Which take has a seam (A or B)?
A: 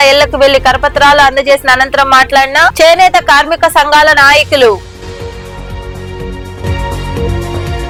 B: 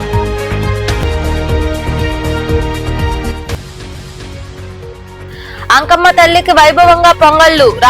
B